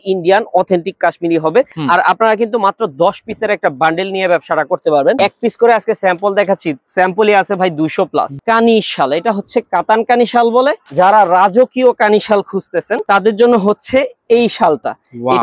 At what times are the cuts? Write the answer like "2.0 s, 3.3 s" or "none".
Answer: 1.7 s, 5.2 s, 8.3 s, 10.8 s, 13.0 s